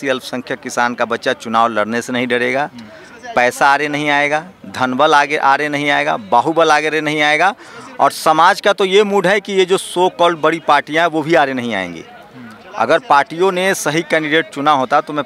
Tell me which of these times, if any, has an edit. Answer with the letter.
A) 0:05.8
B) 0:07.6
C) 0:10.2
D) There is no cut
D